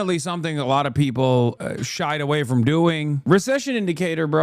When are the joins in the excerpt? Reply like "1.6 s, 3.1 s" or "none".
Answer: 3.1 s